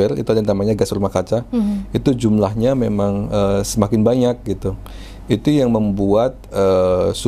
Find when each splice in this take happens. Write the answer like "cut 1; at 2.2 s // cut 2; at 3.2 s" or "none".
none